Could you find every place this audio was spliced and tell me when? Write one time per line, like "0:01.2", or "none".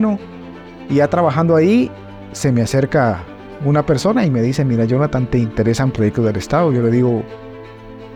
none